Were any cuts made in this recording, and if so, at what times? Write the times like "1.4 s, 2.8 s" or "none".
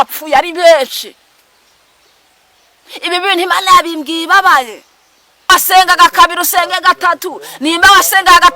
5.5 s